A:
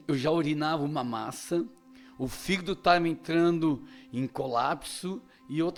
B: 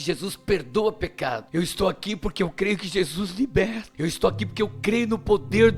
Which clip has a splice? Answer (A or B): B